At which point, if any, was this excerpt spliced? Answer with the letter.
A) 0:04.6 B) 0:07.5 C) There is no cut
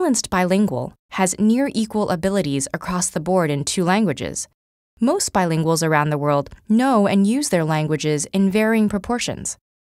B